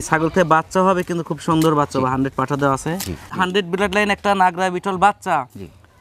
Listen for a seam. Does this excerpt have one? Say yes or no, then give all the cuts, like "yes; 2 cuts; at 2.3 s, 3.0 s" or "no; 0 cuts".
yes; 1 cut; at 3.3 s